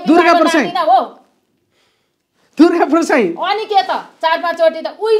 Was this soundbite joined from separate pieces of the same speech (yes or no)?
no